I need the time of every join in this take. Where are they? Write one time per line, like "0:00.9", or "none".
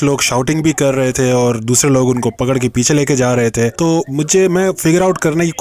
none